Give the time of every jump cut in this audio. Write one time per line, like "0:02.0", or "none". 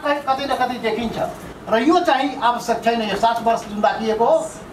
0:01.5